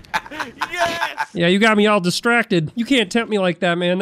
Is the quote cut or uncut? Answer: cut